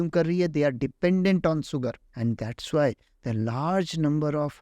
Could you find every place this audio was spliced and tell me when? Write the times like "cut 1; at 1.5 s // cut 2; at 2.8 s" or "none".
cut 1; at 2.1 s